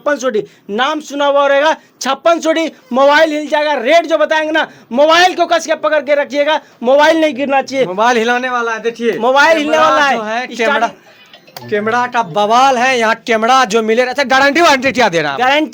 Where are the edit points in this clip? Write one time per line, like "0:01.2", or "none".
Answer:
none